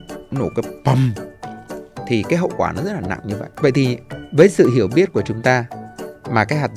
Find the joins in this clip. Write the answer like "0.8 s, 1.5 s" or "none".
3.4 s

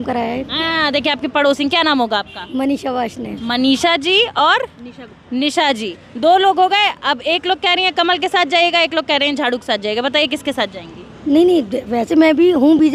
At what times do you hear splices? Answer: none

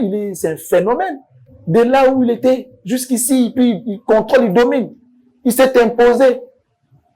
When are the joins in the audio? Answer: none

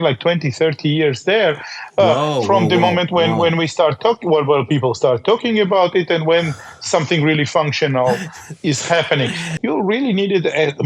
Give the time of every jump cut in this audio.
9.5 s

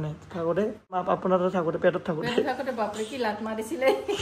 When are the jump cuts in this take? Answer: 1.0 s

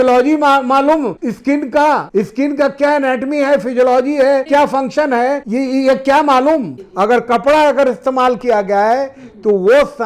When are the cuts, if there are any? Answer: 1.2 s, 2.1 s, 4.4 s, 5.4 s, 6.8 s

